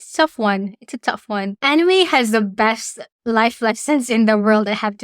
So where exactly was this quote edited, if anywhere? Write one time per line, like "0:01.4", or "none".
0:01.6